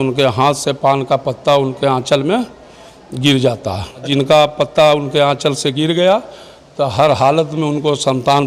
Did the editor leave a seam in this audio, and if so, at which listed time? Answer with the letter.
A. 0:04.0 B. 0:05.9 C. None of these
A